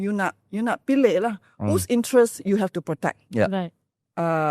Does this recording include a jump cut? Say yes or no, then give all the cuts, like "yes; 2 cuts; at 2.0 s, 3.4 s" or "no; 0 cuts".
no; 0 cuts